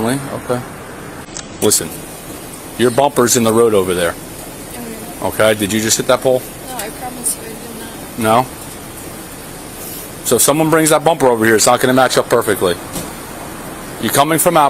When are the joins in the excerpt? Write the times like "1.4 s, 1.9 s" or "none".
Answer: 1.3 s